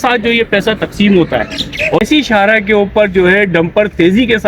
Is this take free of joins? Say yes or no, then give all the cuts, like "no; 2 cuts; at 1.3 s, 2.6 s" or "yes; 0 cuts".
no; 1 cut; at 2.0 s